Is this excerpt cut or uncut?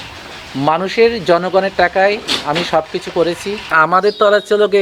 cut